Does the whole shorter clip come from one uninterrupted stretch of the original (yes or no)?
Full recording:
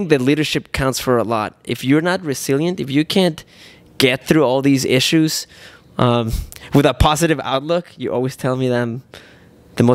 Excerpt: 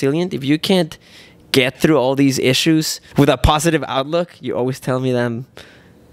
no